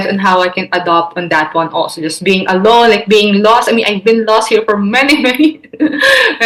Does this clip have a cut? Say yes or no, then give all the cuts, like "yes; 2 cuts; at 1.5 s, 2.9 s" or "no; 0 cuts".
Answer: no; 0 cuts